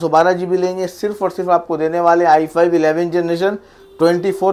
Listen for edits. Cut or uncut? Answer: uncut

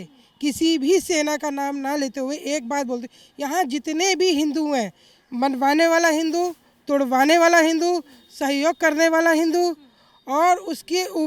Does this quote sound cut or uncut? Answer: uncut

